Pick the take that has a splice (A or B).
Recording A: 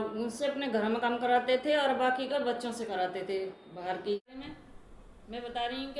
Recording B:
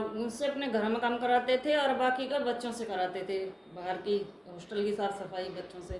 A